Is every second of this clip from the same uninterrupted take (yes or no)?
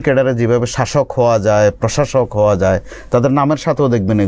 yes